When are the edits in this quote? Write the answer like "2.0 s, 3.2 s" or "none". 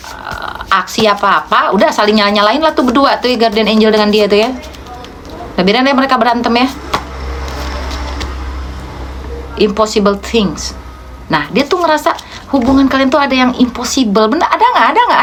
none

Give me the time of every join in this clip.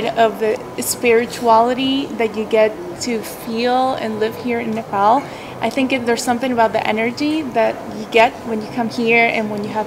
none

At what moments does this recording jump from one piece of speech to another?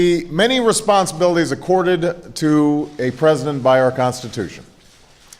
2.7 s

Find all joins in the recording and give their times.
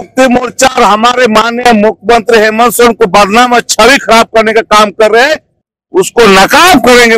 none

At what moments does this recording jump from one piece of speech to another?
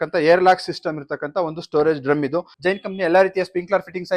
2.5 s

